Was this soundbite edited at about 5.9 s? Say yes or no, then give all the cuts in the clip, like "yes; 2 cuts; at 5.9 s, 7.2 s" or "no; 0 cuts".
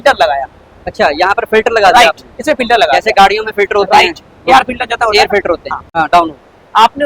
yes; 1 cut; at 5.9 s